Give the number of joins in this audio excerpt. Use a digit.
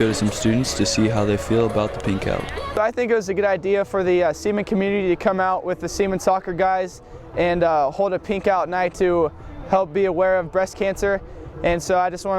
1